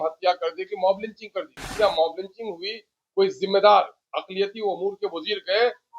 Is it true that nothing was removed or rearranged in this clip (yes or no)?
no